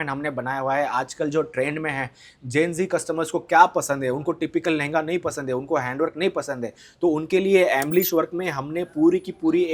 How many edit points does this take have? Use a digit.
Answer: 0